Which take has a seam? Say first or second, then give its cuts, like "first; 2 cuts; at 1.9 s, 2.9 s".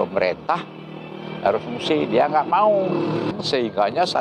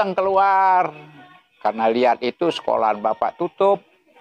first; 1 cut; at 3.3 s